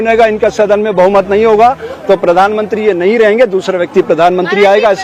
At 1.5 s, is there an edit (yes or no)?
no